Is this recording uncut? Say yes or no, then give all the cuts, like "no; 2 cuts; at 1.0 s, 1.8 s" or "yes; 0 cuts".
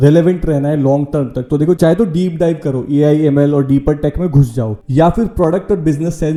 yes; 0 cuts